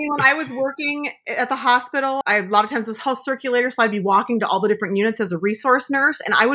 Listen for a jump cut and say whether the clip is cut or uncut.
cut